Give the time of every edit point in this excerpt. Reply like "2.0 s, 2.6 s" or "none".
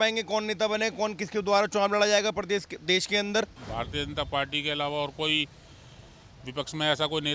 3.6 s